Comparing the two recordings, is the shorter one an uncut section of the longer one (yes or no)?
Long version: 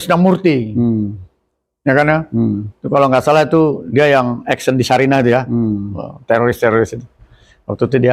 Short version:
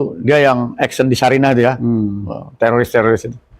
yes